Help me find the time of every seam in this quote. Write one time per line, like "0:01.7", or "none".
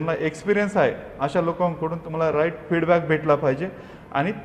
none